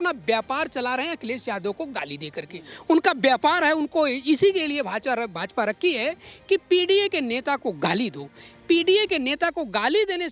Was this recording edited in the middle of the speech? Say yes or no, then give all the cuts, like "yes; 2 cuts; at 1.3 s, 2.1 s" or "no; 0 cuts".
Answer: no; 0 cuts